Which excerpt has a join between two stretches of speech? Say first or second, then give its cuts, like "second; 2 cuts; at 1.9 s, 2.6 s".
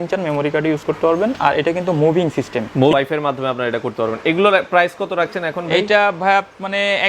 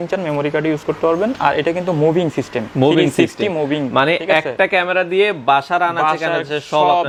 first; 1 cut; at 2.9 s